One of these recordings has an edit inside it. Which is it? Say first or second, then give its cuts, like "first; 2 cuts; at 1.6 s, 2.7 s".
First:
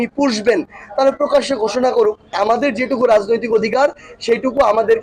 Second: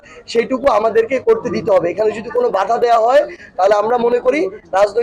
first; 1 cut; at 2.3 s